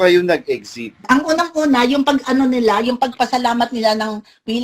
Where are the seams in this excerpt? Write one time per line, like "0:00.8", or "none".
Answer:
0:01.0